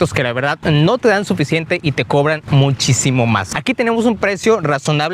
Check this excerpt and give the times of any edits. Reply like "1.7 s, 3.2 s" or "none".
3.5 s